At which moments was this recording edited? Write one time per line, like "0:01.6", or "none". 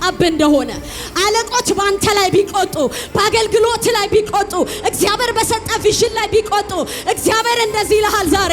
none